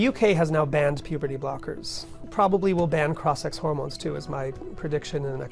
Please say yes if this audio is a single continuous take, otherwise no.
no